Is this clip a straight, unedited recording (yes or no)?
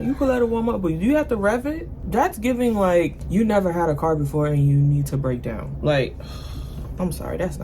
no